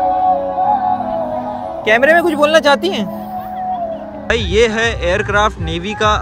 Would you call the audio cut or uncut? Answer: cut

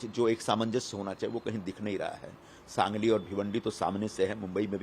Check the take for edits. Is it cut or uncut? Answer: uncut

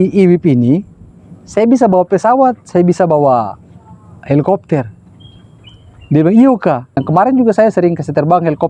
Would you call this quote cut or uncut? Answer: uncut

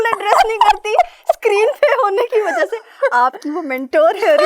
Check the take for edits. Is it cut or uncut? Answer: uncut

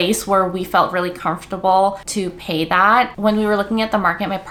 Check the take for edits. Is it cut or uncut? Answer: uncut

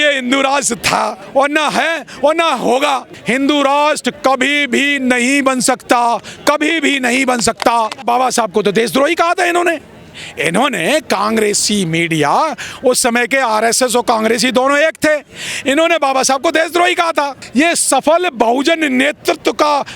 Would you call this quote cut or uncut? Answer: cut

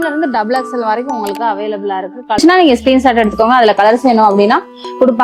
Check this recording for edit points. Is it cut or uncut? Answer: cut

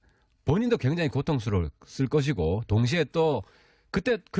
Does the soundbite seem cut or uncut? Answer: uncut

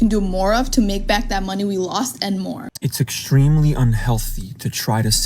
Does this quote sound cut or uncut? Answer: cut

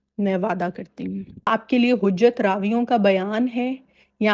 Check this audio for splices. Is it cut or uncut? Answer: cut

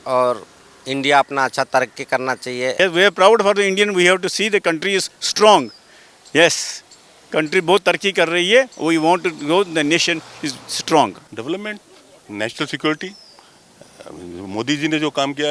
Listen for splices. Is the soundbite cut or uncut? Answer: cut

